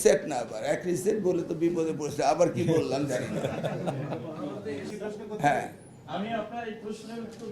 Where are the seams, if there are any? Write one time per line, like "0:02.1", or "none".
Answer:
none